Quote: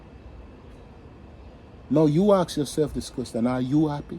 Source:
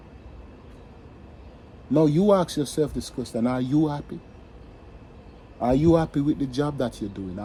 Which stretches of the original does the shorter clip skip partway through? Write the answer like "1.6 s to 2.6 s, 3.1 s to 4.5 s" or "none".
none